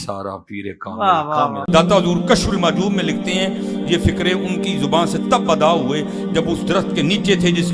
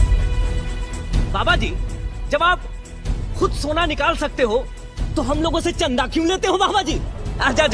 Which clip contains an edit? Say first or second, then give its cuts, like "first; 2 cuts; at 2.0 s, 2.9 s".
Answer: first; 1 cut; at 1.6 s